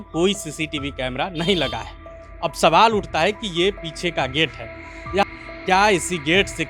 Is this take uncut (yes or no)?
no